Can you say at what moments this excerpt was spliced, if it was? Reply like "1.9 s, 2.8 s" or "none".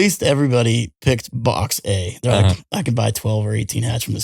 0.9 s

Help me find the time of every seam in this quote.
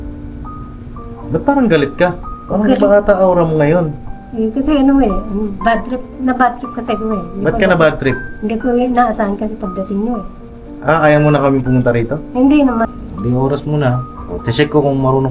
12.9 s

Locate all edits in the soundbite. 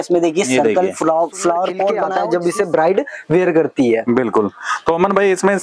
2.0 s

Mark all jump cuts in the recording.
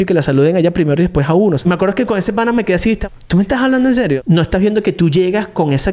1.6 s, 3.0 s, 4.2 s

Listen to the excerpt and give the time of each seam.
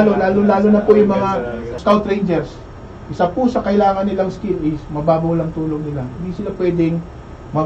1.8 s

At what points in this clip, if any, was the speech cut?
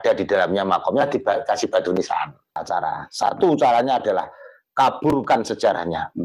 2.6 s

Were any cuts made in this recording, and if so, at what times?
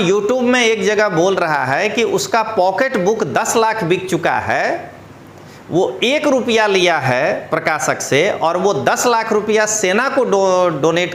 none

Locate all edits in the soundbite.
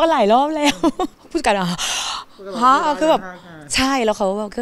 1.1 s

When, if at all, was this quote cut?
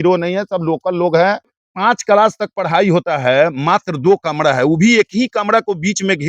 1.7 s

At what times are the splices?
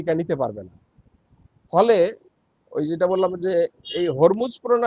none

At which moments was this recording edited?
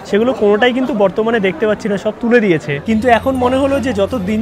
2.8 s

